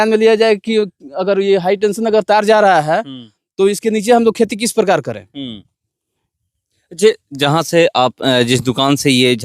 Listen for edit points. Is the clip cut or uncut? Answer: uncut